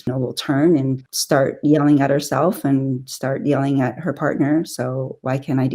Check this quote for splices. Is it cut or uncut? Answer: cut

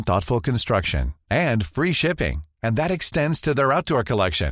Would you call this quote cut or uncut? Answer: uncut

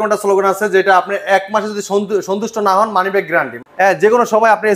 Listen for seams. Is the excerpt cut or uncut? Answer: cut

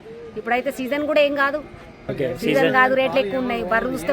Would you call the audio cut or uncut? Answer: cut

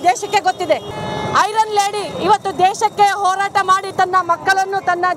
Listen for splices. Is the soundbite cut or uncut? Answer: cut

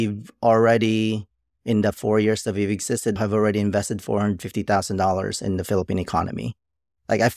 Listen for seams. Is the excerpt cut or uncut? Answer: cut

